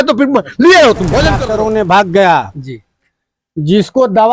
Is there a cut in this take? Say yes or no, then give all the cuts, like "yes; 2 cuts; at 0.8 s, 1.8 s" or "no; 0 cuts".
yes; 1 cut; at 1.4 s